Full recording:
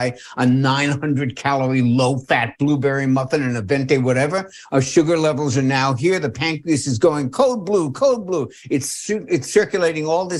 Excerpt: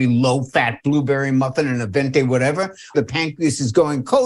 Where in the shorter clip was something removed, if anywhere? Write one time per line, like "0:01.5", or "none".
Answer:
0:02.9